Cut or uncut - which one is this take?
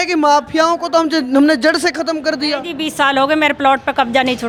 uncut